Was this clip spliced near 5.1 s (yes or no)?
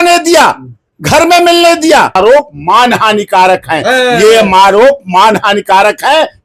no